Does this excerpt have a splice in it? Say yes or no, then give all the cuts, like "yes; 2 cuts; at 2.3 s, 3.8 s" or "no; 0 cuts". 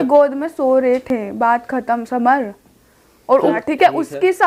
no; 0 cuts